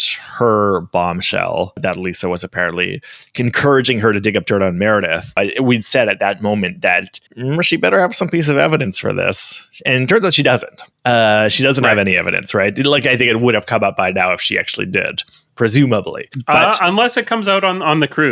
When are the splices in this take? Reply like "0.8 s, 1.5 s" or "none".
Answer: 1.8 s, 5.4 s, 16.3 s